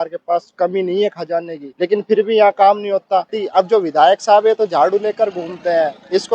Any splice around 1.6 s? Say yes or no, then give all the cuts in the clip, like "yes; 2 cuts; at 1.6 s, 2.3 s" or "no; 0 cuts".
yes; 2 cuts; at 1.6 s, 3.4 s